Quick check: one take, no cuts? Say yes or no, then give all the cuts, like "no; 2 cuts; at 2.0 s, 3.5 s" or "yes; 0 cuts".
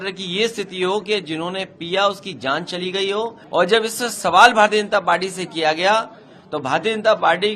no; 1 cut; at 3.4 s